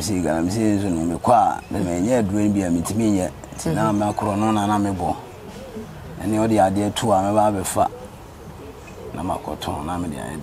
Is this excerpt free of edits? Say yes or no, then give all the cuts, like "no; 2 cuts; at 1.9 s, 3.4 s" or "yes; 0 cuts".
yes; 0 cuts